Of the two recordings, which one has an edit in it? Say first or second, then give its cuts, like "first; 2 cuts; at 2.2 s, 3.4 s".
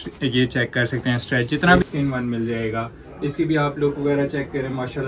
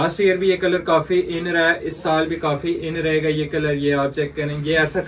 first; 1 cut; at 1.8 s